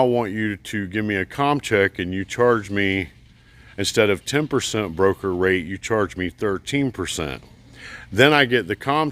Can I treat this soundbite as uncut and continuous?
yes; 0 cuts

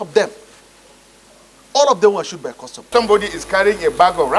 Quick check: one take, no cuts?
no; 1 cut; at 2.9 s

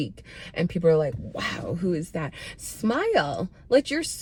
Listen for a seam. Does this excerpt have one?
no; 0 cuts

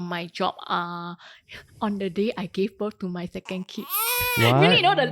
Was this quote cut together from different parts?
no; 0 cuts

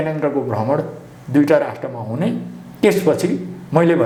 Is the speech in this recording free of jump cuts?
yes; 0 cuts

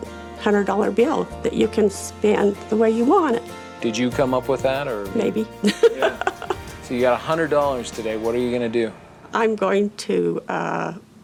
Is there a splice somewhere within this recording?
no; 0 cuts

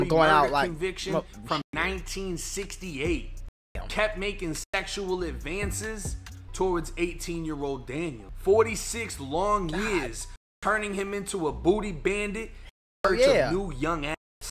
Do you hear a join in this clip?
yes; 1 cut; at 8.3 s

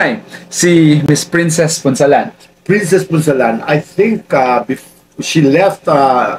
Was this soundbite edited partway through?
no; 0 cuts

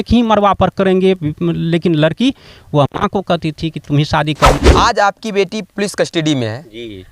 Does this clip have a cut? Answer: yes; 1 cut; at 4.6 s

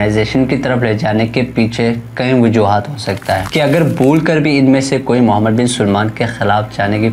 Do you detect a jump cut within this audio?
yes; 1 cut; at 3.5 s

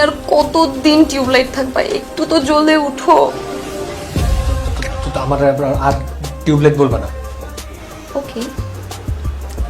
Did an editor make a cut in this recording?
yes; 1 cut; at 7.2 s

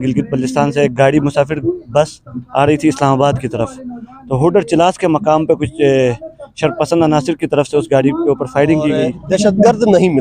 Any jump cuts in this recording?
yes; 1 cut; at 9.1 s

